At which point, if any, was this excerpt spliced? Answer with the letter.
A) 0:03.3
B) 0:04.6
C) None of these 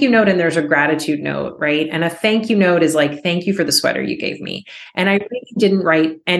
C